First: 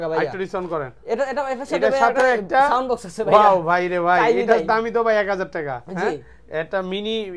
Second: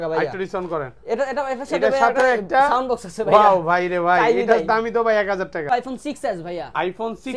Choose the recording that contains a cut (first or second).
second